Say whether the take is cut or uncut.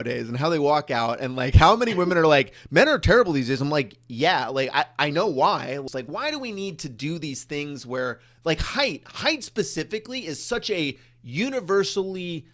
cut